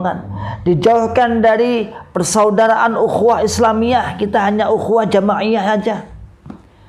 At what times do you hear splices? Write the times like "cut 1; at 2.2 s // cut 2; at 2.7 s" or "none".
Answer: none